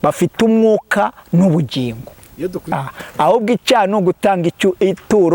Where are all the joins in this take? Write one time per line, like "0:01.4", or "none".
0:02.7